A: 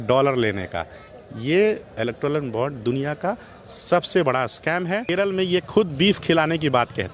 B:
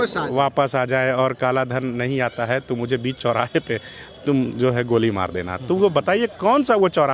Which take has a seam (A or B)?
A